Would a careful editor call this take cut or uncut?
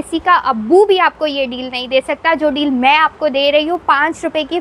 uncut